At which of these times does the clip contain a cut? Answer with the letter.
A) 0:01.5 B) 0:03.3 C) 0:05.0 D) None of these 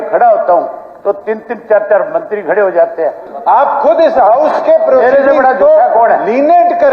B